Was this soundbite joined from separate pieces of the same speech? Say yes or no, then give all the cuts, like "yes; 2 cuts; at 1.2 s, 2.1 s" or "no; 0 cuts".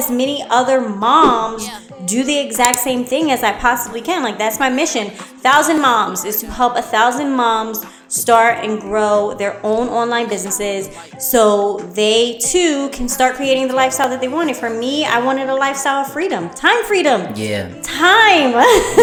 no; 0 cuts